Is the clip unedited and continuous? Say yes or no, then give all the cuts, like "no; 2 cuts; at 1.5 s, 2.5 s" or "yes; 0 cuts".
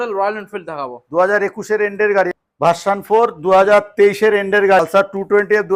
no; 2 cuts; at 2.3 s, 4.8 s